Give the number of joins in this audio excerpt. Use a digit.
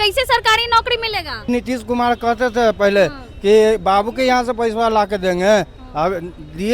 1